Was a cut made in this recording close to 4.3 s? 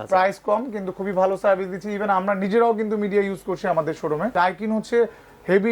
yes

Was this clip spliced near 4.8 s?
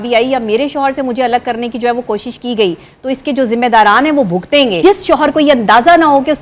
yes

